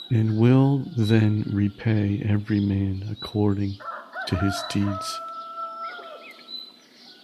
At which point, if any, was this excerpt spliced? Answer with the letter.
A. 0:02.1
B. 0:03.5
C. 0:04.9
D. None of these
C